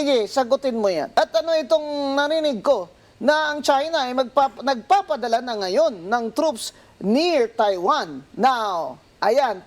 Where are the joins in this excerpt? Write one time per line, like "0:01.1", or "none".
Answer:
0:01.1